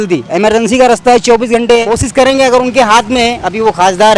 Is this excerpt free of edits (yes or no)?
no